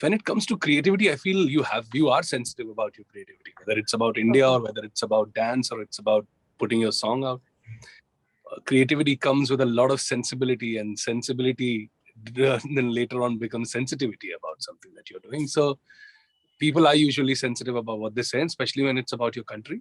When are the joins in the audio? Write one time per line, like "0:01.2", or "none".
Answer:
none